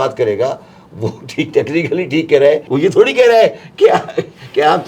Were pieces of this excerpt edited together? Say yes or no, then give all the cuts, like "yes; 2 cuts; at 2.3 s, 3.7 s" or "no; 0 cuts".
yes; 1 cut; at 2.6 s